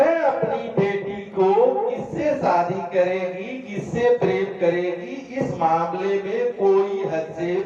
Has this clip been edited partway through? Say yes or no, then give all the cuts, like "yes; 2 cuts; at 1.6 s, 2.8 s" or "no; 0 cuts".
no; 0 cuts